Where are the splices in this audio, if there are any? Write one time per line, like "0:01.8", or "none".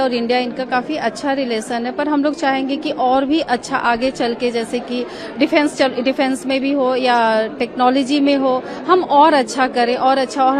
none